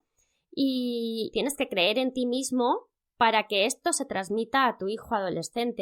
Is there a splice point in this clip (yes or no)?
no